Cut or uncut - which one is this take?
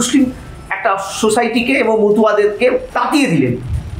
cut